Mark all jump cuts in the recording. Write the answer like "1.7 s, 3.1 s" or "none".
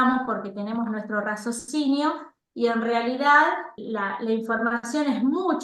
3.8 s